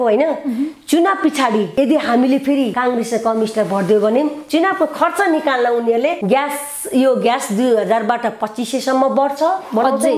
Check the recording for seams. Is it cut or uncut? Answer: cut